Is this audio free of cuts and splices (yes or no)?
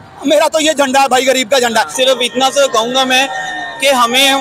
no